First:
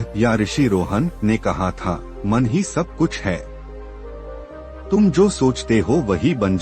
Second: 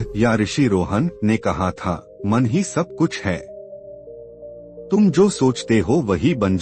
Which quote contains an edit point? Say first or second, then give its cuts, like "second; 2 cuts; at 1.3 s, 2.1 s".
first; 2 cuts; at 3.5 s, 4.9 s